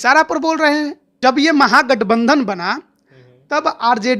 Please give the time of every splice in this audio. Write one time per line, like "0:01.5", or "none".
0:01.0